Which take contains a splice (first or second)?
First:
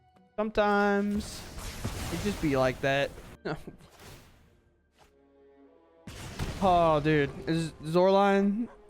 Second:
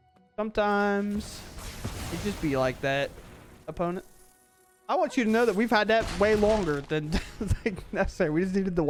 first